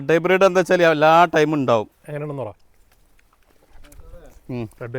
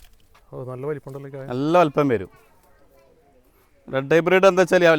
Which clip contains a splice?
first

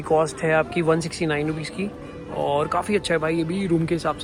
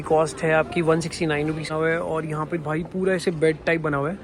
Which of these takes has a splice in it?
second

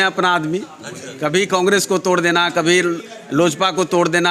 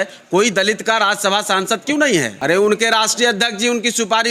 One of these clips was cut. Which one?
second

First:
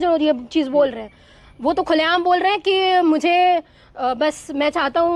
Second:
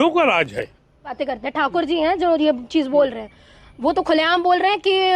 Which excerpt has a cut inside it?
second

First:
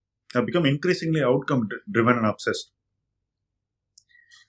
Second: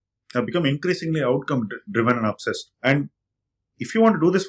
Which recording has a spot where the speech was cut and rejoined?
second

